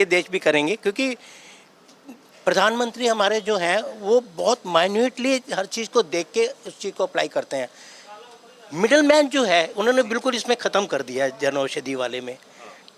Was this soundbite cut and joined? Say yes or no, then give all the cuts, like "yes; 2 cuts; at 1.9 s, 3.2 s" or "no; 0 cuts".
no; 0 cuts